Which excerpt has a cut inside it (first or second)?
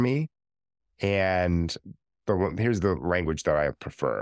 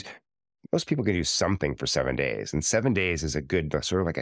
first